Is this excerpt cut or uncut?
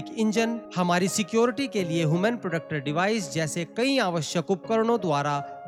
uncut